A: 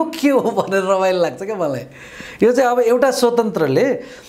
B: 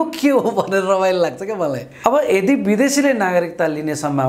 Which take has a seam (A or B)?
B